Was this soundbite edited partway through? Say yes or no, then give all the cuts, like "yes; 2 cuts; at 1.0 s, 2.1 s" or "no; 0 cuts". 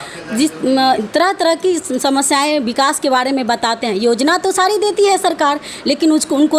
no; 0 cuts